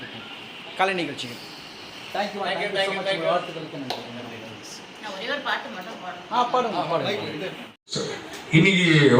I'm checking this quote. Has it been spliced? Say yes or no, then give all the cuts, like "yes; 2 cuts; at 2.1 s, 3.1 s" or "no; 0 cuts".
yes; 1 cut; at 7.8 s